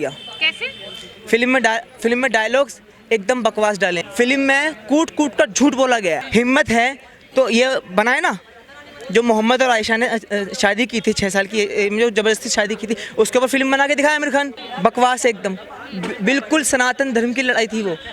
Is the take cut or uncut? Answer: cut